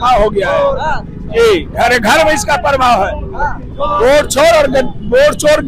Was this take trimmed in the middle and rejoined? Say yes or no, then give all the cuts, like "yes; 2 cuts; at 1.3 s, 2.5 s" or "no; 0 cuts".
no; 0 cuts